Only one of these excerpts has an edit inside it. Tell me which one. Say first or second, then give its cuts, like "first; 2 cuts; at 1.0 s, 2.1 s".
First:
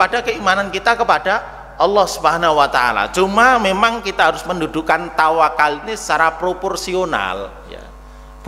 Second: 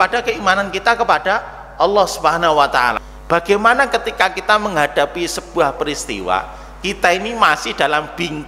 second; 1 cut; at 3.0 s